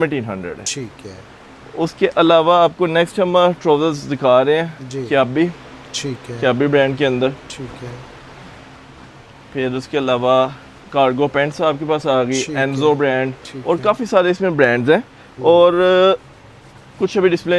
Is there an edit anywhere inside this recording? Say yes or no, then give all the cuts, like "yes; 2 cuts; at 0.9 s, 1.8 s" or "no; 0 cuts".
no; 0 cuts